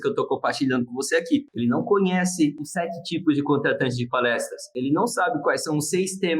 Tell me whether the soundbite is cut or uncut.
cut